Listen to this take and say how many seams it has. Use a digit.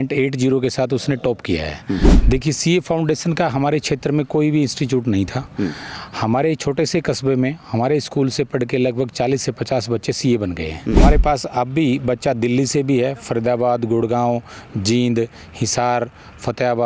2